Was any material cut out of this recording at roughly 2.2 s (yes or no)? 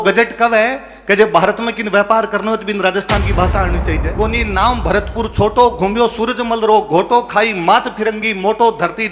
no